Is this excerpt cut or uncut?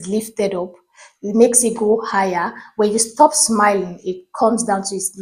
uncut